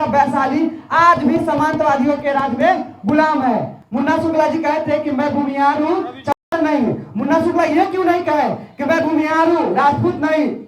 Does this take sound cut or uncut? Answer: cut